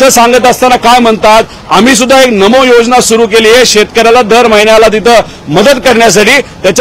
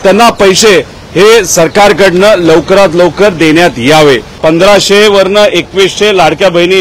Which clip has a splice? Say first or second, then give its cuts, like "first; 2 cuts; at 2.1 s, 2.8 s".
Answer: second; 1 cut; at 4.3 s